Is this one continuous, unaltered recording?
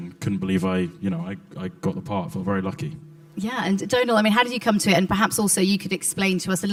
yes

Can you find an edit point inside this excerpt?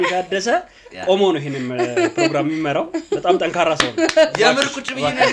no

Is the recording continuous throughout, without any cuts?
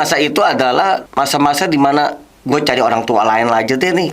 no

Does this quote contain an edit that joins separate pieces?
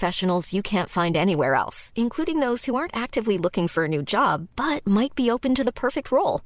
no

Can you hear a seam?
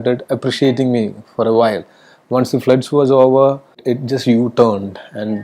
yes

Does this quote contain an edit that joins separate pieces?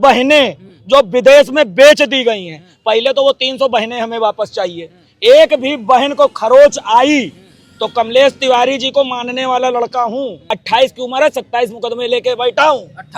yes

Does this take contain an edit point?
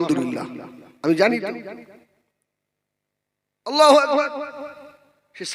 no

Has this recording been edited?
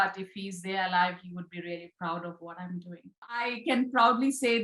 yes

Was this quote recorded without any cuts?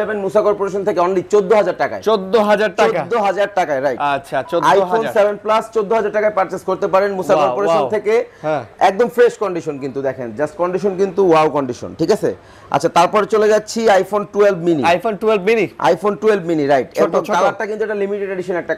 yes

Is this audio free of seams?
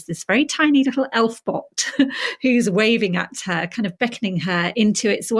yes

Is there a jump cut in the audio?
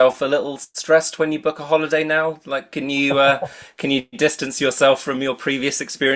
no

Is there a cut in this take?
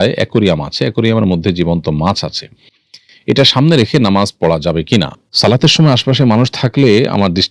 yes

